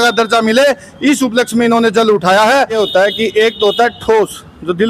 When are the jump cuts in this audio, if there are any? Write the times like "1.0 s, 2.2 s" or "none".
2.7 s